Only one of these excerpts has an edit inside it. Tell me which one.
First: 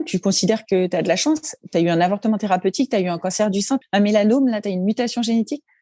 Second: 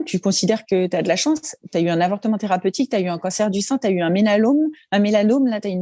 first; 1 cut; at 3.8 s

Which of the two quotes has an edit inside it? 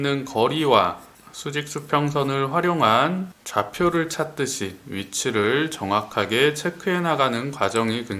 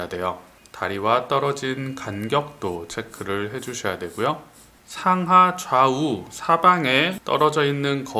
second; 1 cut; at 4.8 s

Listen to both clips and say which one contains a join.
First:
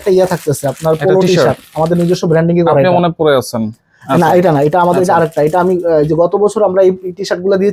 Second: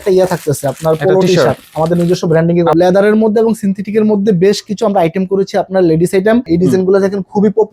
second; 2 cuts; at 2.7 s, 6.5 s

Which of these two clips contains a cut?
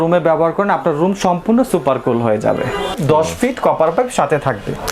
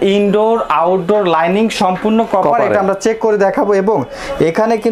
first; 1 cut; at 3.0 s

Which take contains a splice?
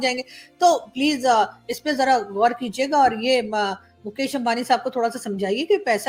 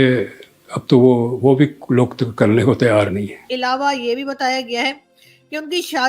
second; 1 cut; at 3.5 s

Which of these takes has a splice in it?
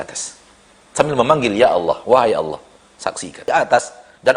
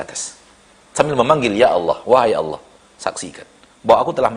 first; 1 cut; at 3.5 s

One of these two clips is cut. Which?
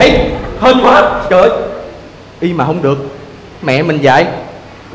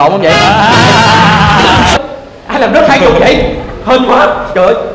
second; 1 cut; at 2.0 s

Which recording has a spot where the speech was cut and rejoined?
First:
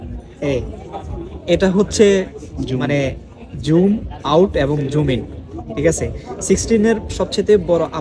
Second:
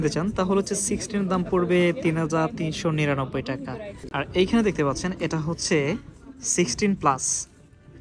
second; 1 cut; at 4.0 s

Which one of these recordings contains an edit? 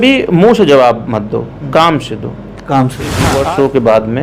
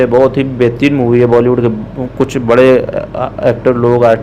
first; 1 cut; at 3.3 s

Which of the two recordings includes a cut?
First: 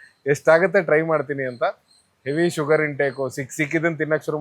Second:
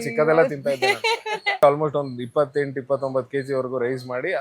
second; 1 cut; at 1.6 s

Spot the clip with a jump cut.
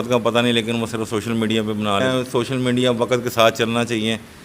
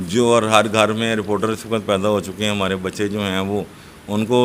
first; 1 cut; at 2.0 s

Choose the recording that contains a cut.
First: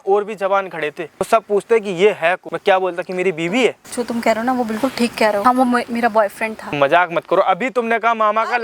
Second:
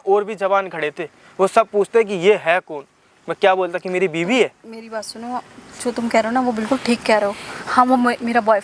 first; 5 cuts; at 1.3 s, 2.5 s, 3.8 s, 5.4 s, 6.8 s

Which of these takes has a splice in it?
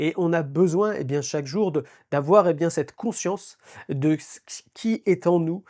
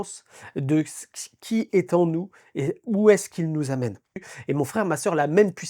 second; 1 cut; at 4.1 s

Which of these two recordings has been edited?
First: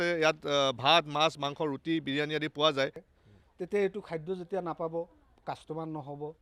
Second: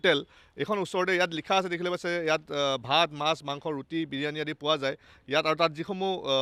first; 1 cut; at 3.1 s

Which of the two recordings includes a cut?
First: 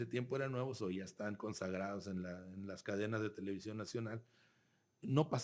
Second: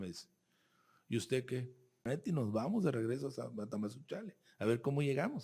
second; 1 cut; at 2.1 s

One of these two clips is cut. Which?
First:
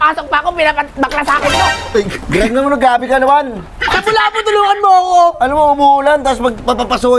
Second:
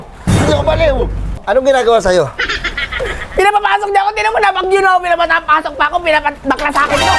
second; 1 cut; at 1.4 s

